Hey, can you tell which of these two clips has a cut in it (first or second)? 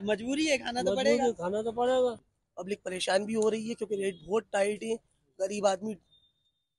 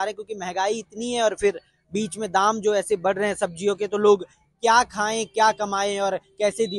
first